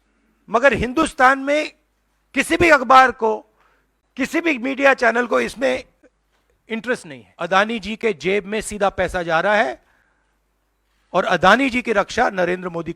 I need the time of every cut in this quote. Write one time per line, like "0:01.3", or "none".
0:07.2